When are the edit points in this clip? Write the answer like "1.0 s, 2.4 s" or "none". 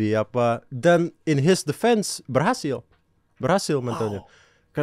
none